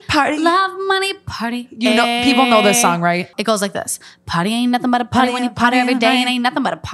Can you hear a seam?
yes; 1 cut; at 3.3 s

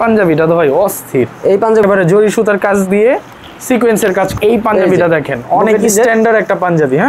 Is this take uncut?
no; 2 cuts; at 1.8 s, 4.4 s

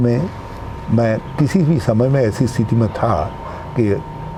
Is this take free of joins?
yes; 0 cuts

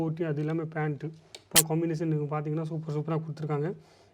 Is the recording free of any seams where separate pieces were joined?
no; 1 cut; at 1.5 s

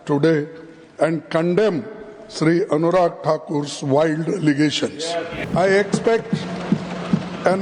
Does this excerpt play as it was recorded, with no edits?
no; 1 cut; at 5.5 s

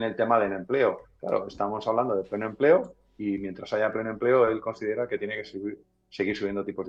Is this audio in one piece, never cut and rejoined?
yes; 0 cuts

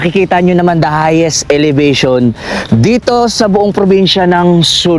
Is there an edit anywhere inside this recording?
no; 0 cuts

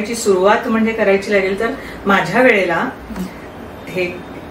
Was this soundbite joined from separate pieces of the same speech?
no; 0 cuts

